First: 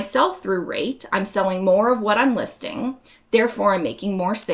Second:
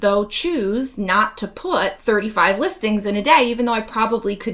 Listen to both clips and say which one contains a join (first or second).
second